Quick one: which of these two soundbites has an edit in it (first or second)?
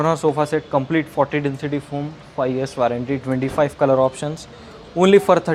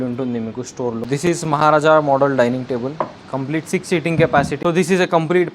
second